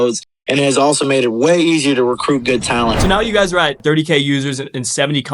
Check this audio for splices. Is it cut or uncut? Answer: cut